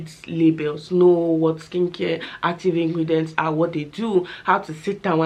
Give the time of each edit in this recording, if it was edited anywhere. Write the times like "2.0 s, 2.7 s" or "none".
none